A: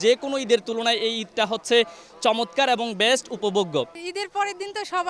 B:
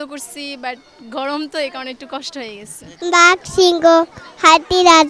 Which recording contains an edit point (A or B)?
A